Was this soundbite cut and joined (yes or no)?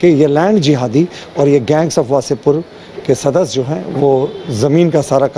no